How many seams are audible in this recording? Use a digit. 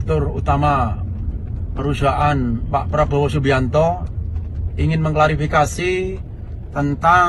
0